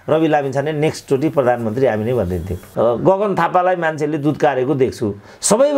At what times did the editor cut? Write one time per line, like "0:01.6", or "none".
0:02.6